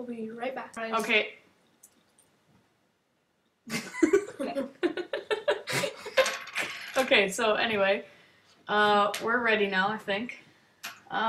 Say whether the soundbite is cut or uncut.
uncut